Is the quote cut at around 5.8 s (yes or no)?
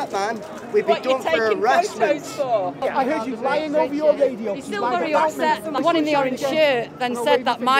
yes